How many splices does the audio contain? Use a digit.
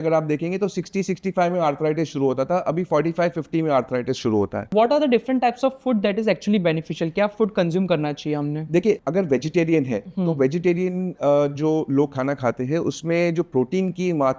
2